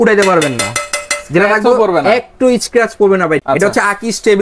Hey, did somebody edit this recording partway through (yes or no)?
yes